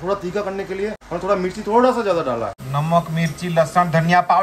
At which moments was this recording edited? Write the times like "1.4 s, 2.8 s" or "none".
1.0 s, 2.5 s